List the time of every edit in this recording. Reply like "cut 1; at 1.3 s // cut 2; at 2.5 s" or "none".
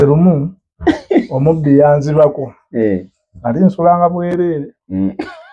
none